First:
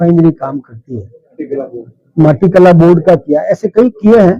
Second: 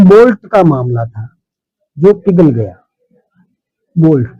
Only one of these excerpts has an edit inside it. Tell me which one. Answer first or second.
first